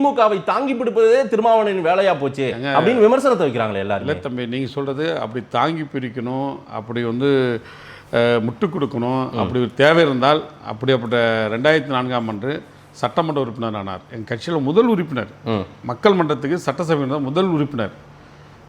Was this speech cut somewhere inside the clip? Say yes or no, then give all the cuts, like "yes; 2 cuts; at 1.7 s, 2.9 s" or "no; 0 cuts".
no; 0 cuts